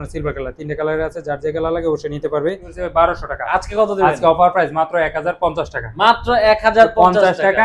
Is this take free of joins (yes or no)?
no